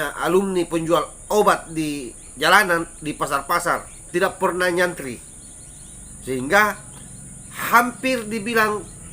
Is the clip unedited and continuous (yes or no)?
no